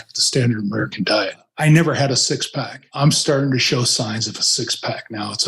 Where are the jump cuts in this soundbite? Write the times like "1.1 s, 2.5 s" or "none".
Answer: 1.4 s, 2.9 s